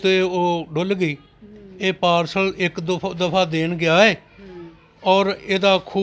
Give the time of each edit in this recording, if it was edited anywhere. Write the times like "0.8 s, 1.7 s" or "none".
none

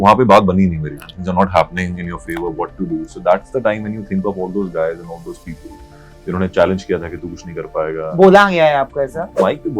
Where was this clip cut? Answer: 1.1 s

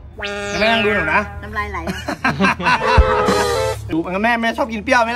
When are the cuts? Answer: 3.8 s

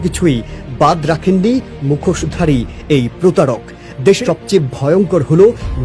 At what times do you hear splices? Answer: 4.2 s

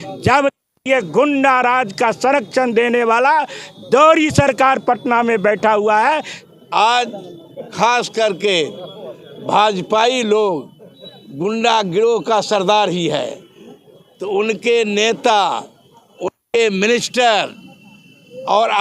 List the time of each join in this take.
6.4 s

